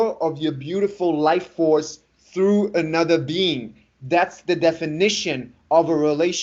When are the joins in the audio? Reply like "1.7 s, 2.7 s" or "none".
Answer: none